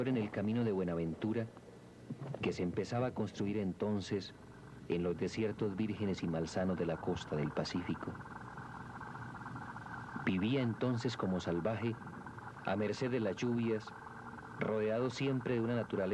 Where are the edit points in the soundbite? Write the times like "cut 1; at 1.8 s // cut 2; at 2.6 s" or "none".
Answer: none